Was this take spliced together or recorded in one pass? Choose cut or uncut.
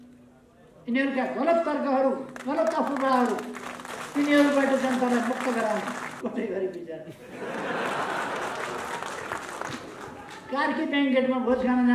cut